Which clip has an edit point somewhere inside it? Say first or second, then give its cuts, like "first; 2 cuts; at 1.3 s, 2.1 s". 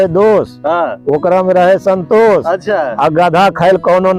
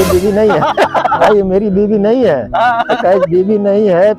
second; 1 cut; at 1.2 s